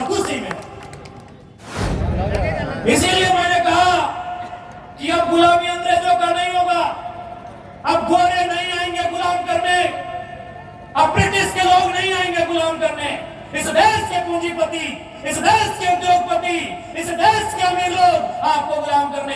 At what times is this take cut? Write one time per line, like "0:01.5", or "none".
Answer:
0:02.0